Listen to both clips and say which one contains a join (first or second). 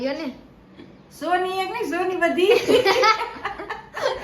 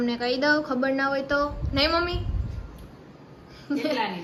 first